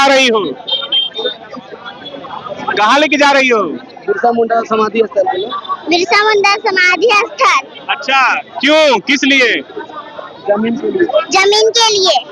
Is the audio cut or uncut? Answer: uncut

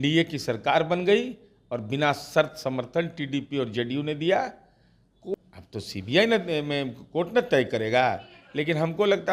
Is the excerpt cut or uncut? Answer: cut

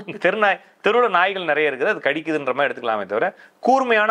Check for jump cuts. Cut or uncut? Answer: uncut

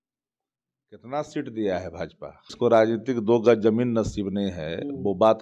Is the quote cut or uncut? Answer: cut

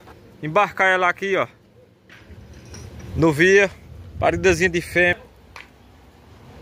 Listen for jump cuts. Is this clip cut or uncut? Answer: cut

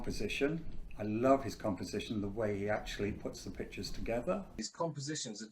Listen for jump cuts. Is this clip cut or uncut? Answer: cut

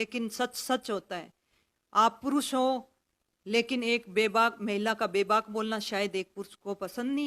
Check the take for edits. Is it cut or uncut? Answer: uncut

